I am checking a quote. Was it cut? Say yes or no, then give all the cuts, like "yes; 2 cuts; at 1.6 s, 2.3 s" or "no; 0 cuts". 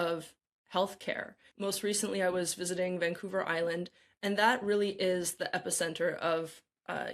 yes; 1 cut; at 1.4 s